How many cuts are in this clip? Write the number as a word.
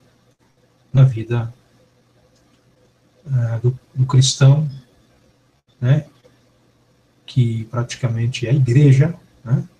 one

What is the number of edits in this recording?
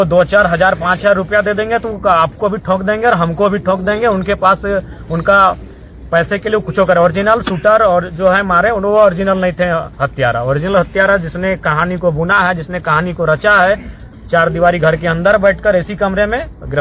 zero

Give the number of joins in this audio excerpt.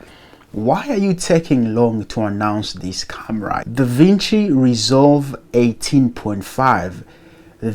one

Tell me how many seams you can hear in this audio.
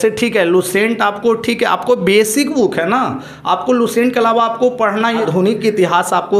one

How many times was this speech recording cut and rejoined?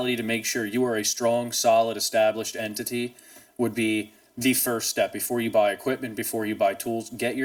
zero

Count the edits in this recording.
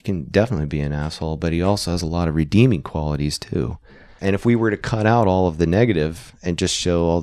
one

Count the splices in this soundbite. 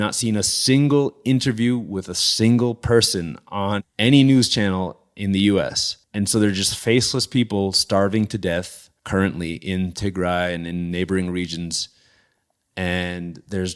one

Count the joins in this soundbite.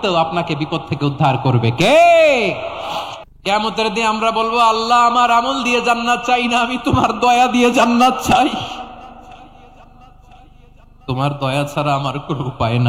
one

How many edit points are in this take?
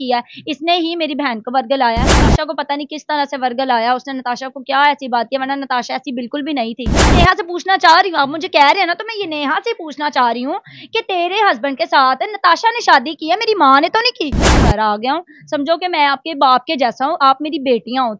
three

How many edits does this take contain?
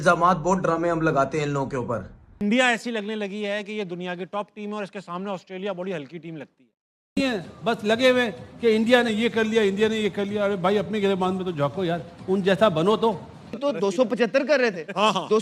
three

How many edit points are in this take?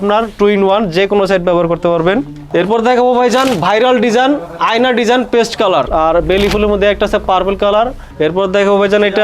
three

